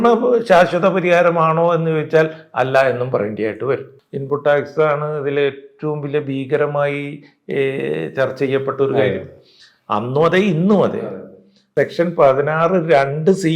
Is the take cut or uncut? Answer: cut